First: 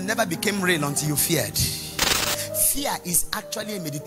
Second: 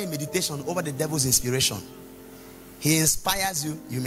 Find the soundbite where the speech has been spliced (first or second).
first